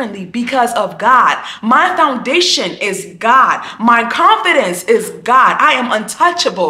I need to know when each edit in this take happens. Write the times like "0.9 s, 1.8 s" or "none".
none